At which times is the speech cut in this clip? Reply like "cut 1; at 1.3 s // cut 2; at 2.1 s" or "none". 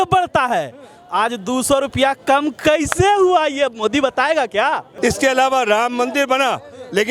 cut 1; at 4.9 s